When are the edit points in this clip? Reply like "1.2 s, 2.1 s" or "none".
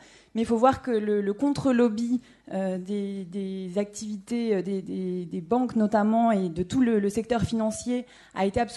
none